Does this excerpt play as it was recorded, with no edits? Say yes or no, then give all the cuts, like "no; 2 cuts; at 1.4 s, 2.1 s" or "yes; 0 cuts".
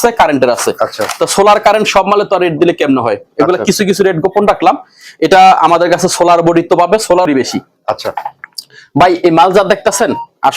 no; 1 cut; at 7.3 s